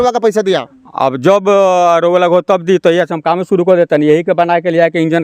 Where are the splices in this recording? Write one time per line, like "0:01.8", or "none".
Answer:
none

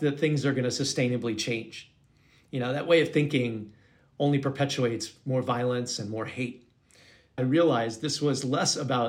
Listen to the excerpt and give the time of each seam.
0:07.4

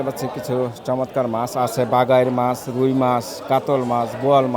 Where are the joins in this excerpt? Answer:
none

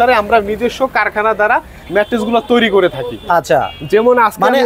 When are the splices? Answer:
none

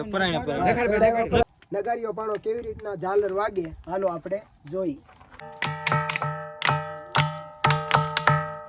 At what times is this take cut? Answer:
0:01.4
0:05.4

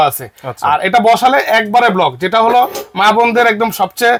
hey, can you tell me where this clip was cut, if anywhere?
none

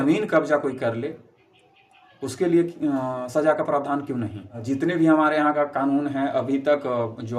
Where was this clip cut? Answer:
none

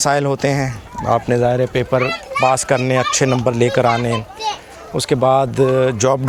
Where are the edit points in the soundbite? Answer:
none

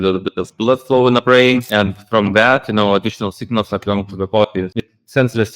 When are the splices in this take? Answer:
0:01.7
0:04.7

